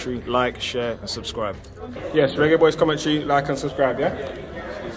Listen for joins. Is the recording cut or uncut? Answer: cut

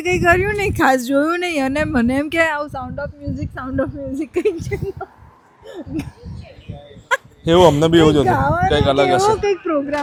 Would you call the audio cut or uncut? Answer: uncut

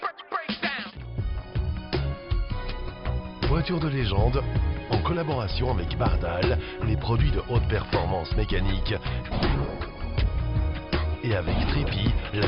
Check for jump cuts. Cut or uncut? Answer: cut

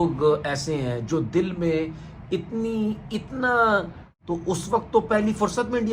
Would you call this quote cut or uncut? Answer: cut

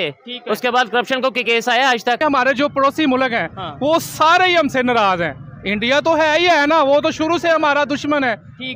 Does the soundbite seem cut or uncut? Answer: cut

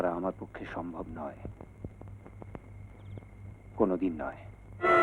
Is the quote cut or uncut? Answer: uncut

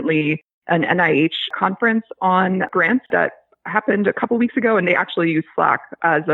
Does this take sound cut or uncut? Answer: cut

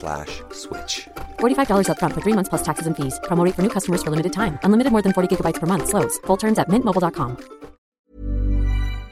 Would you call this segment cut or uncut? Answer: cut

